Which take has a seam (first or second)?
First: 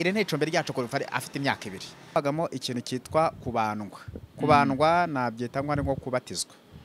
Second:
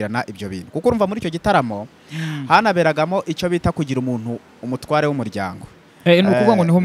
first